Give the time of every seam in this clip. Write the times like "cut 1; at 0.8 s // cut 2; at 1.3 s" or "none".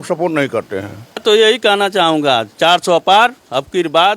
cut 1; at 1.2 s